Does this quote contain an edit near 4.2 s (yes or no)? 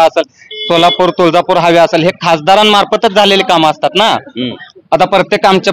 no